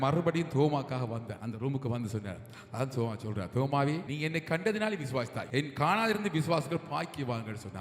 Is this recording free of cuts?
no; 3 cuts; at 1.3 s, 4.1 s, 5.4 s

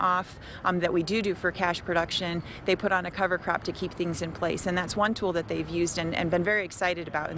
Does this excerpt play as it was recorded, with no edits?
yes; 0 cuts

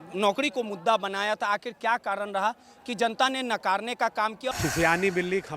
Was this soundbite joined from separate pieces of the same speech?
yes; 1 cut; at 4.5 s

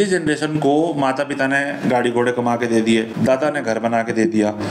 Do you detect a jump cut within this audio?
no; 0 cuts

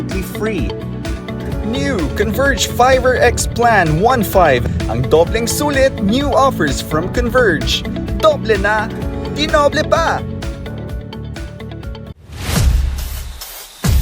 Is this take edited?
yes; 1 cut; at 12.2 s

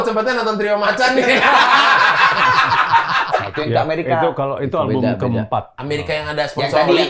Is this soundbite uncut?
no; 1 cut; at 3.4 s

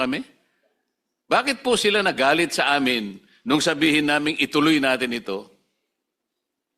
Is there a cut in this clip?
no; 0 cuts

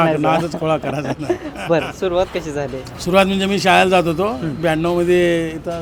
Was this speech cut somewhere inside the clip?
no; 0 cuts

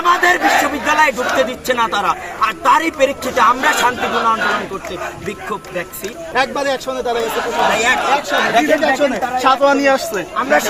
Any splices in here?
yes; 1 cut; at 6.2 s

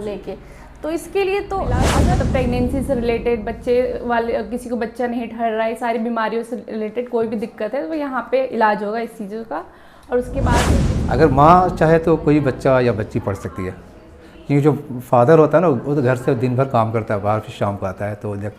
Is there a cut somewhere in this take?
yes; 2 cuts; at 2.0 s, 10.8 s

